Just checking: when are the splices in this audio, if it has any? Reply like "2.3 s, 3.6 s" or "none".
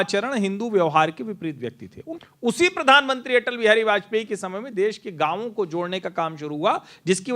2.0 s